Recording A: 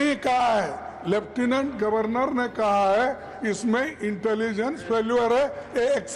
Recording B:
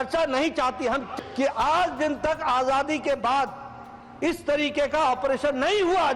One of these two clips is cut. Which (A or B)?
B